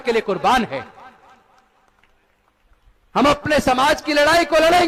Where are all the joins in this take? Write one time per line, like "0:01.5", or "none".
none